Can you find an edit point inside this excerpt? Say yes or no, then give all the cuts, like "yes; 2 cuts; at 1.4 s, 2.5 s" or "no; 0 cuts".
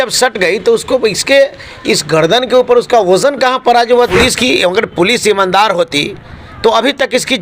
yes; 1 cut; at 4.1 s